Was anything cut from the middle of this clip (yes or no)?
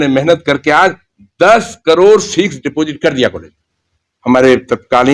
yes